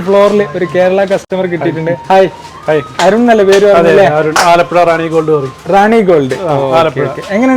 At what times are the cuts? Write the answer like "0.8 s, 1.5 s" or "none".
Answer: 1.3 s